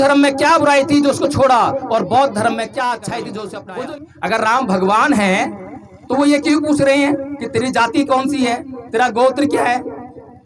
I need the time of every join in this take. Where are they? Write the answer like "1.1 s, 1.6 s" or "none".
3.7 s